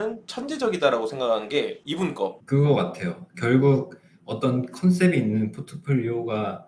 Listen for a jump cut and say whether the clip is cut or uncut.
cut